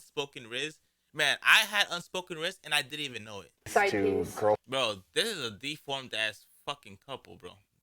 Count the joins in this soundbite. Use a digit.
1